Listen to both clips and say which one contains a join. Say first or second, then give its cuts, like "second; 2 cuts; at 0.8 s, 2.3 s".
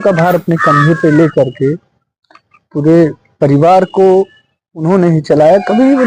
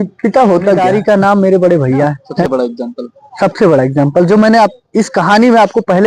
second; 2 cuts; at 0.8 s, 2.3 s